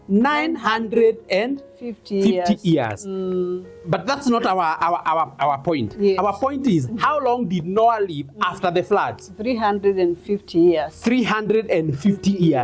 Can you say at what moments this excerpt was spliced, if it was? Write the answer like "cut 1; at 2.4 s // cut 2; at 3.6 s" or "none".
none